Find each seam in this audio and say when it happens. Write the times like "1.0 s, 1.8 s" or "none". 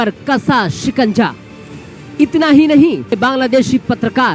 3.2 s